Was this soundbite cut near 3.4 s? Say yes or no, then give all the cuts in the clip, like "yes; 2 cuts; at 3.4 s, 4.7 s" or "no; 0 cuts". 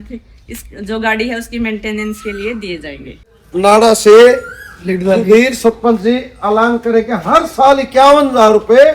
yes; 1 cut; at 3.4 s